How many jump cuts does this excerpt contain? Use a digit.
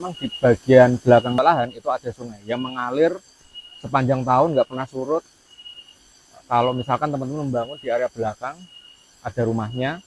1